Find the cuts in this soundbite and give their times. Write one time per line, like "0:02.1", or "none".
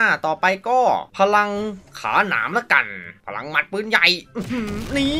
0:03.2